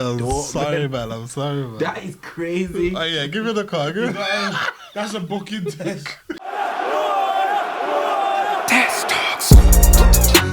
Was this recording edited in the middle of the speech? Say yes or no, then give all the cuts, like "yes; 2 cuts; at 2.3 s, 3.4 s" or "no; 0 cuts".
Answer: yes; 1 cut; at 6.3 s